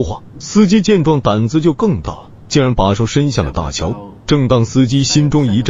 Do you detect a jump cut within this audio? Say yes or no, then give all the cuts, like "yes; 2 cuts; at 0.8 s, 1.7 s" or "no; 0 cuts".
no; 0 cuts